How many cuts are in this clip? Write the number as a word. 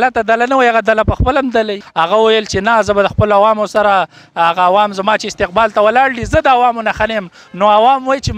one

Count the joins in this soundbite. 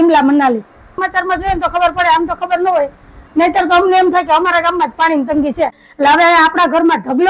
two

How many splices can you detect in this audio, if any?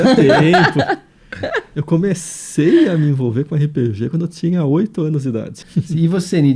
one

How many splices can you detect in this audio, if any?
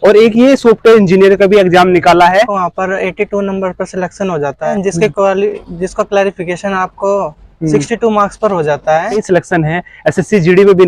three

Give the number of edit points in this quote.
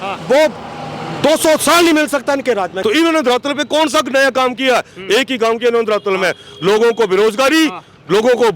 one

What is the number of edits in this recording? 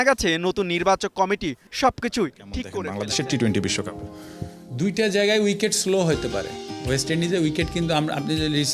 one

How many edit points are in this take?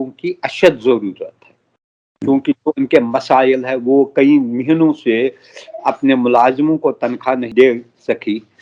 one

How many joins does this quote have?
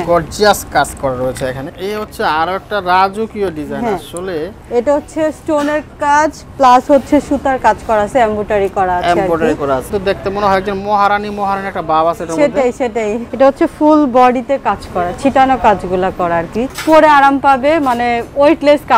four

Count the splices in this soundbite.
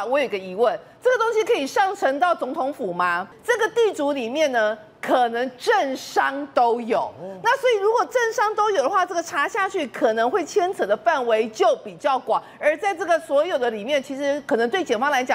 one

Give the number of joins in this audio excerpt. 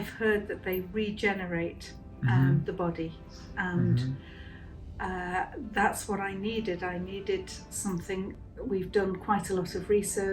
one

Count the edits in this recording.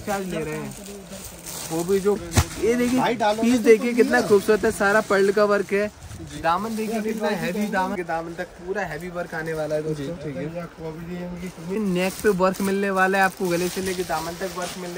three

